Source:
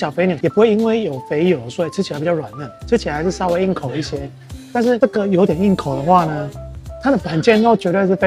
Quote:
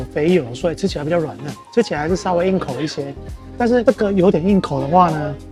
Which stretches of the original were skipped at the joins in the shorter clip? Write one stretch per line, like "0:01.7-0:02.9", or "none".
none